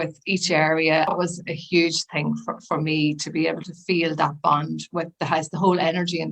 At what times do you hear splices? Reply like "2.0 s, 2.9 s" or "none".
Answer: 1.1 s

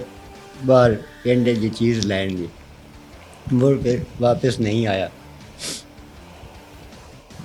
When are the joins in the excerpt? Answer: none

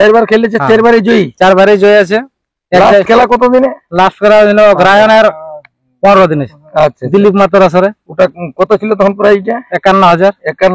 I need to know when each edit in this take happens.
none

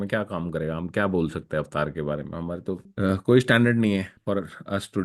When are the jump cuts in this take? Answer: 2.9 s, 4.1 s

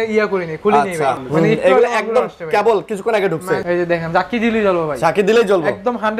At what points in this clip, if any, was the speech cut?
1.2 s, 3.6 s

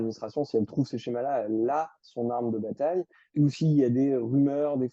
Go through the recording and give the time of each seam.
3.2 s

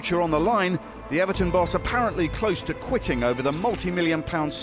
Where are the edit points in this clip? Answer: none

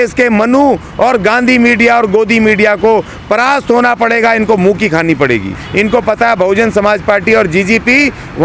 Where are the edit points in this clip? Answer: 5.6 s

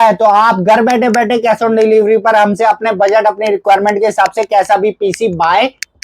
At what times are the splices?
none

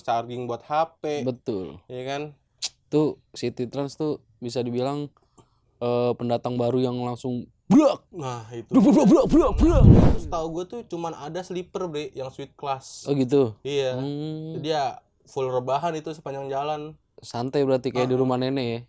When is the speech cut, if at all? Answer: 10.0 s

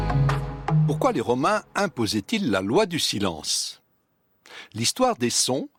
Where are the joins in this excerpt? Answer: none

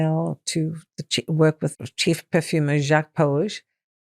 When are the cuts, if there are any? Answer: 1.9 s

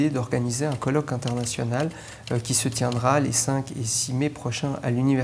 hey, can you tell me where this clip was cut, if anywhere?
none

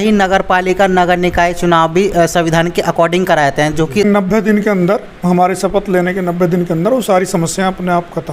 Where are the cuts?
4.0 s

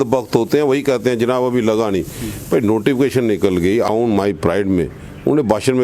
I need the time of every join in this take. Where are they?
3.9 s

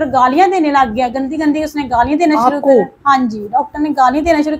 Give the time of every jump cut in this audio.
none

